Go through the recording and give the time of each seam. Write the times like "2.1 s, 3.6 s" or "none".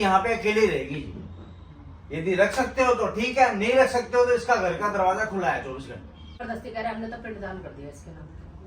6.4 s

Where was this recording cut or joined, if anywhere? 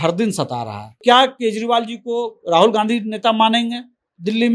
1.0 s

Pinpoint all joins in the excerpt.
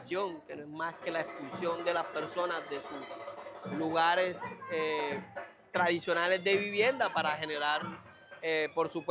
none

